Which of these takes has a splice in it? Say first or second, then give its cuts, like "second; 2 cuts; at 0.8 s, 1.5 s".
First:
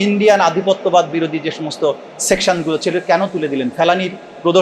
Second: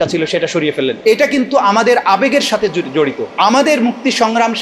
second; 2 cuts; at 1.0 s, 3.2 s